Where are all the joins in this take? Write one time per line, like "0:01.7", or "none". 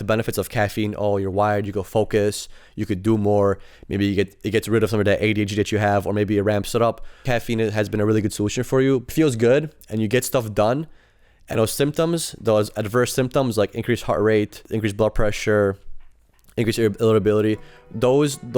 0:07.2
0:09.1
0:14.6